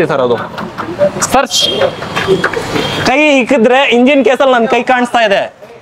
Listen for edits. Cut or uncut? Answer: uncut